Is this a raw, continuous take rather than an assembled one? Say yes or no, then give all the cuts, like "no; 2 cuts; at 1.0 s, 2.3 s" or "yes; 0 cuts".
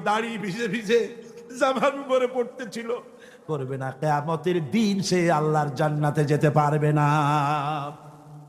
no; 1 cut; at 3.4 s